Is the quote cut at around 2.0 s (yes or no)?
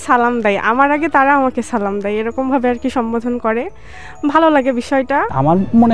no